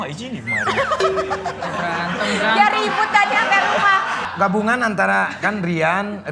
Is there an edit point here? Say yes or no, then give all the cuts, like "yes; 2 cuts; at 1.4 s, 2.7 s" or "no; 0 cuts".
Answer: yes; 1 cut; at 4.2 s